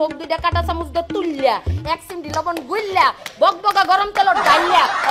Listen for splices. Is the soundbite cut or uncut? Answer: uncut